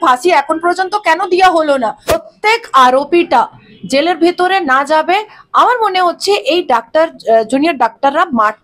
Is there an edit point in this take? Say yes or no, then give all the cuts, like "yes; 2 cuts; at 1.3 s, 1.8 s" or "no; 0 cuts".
yes; 1 cut; at 2.2 s